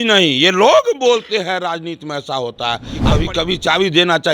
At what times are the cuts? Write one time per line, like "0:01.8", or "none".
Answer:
0:02.9